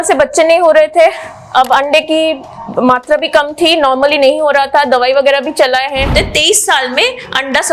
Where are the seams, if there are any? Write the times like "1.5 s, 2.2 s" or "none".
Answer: 6.1 s